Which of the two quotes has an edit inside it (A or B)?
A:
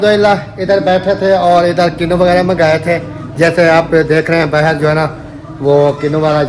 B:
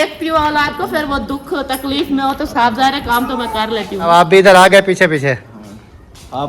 B